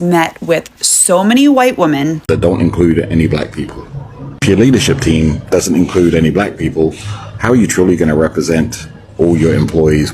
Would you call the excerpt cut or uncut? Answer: cut